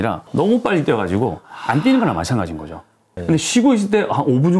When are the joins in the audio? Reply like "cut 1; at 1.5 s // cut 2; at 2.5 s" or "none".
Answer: cut 1; at 3.1 s